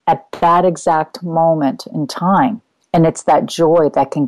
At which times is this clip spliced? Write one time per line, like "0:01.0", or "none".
0:02.7